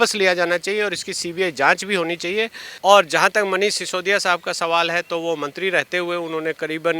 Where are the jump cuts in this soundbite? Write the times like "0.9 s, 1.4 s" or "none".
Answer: 2.6 s